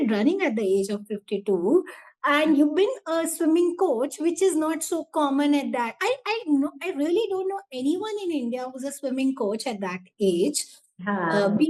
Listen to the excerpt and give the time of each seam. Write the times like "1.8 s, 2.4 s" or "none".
none

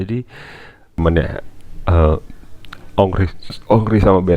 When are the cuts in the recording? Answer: 1.0 s

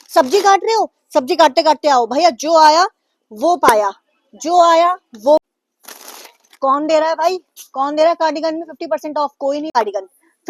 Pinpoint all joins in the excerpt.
5.4 s, 9.8 s

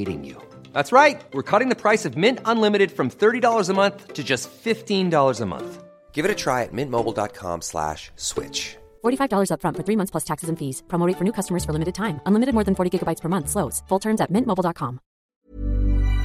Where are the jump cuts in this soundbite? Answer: 15.3 s

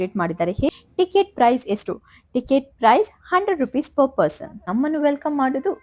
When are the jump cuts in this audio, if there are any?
0.7 s, 4.5 s

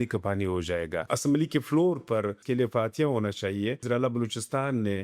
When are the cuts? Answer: 1.1 s, 2.4 s, 3.8 s

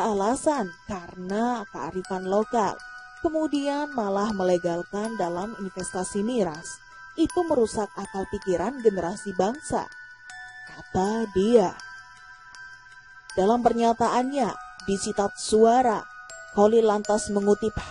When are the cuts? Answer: 11.8 s, 13.3 s

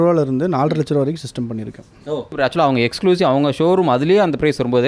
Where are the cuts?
2.3 s

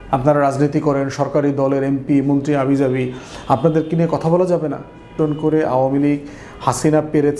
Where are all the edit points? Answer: 5.1 s

